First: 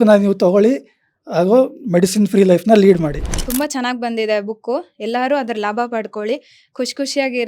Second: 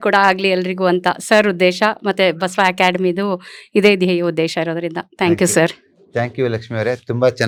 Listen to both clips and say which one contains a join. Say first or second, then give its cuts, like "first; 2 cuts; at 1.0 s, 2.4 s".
first; 1 cut; at 3.1 s